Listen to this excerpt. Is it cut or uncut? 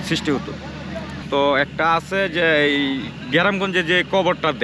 cut